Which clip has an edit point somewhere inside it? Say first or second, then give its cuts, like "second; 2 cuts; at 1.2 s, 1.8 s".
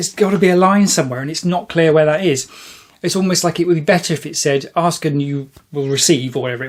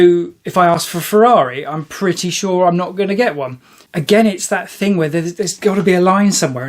second; 1 cut; at 3.8 s